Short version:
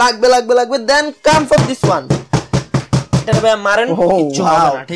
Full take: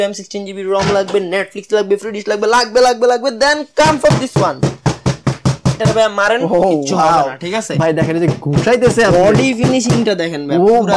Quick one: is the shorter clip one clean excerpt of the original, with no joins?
yes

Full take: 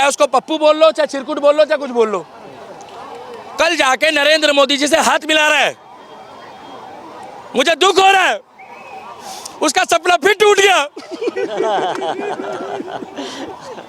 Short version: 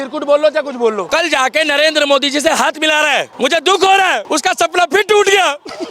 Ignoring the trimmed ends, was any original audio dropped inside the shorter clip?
yes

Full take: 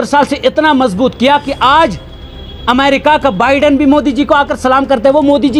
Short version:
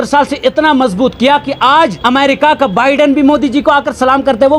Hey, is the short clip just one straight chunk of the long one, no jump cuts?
no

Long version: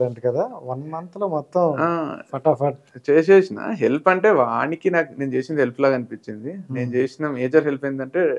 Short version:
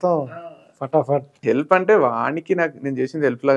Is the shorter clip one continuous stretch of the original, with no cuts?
no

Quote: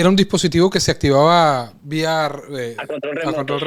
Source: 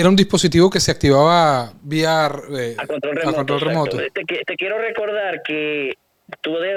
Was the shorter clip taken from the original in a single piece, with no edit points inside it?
yes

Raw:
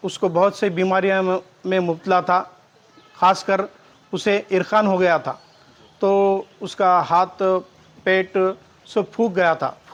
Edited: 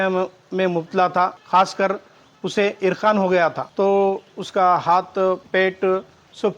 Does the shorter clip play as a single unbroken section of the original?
no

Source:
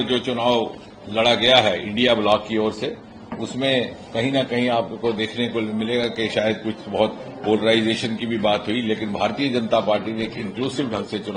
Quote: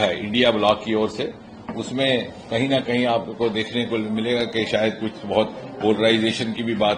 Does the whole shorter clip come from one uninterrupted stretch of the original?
yes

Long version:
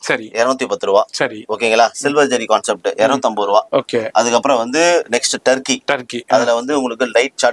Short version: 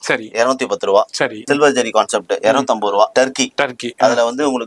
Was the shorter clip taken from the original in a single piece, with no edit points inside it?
no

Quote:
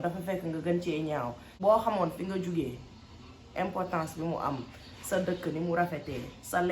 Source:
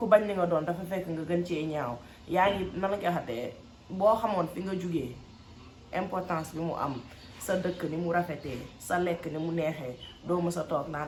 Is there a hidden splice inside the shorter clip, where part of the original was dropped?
yes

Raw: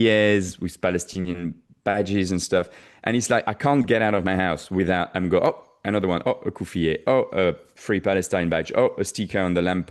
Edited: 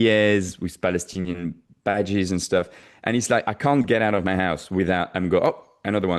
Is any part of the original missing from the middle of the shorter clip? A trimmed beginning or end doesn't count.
no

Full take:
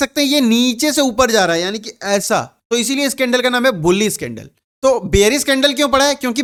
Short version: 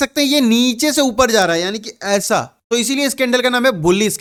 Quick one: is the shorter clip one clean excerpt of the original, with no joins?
yes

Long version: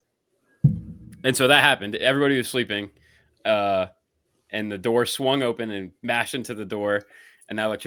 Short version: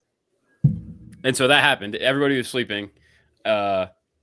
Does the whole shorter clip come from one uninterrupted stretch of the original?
yes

